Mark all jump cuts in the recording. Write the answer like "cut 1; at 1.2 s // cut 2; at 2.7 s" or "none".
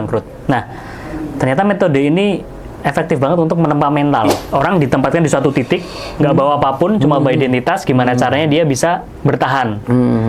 cut 1; at 4.3 s